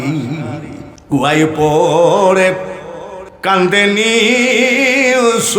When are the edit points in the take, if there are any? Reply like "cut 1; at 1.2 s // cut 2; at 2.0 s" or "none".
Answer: cut 1; at 0.9 s